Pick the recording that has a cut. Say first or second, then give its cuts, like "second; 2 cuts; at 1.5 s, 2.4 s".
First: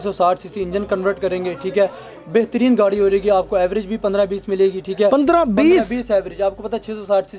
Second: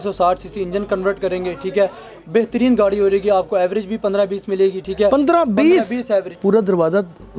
second; 1 cut; at 6.3 s